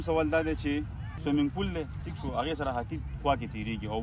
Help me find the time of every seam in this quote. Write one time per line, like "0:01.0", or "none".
0:01.0